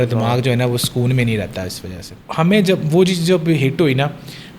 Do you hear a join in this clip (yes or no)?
yes